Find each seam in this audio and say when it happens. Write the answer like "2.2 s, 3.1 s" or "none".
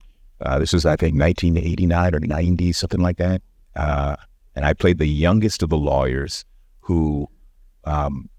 none